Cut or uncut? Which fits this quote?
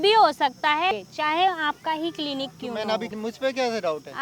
cut